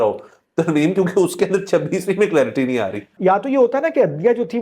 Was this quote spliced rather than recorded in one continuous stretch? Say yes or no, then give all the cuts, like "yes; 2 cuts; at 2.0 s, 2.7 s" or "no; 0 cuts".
yes; 1 cut; at 3.1 s